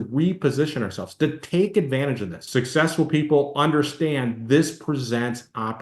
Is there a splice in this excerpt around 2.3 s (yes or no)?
yes